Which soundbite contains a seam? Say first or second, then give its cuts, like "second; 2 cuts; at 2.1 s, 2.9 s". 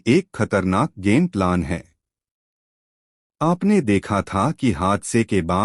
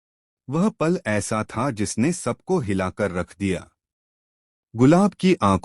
second; 1 cut; at 2.4 s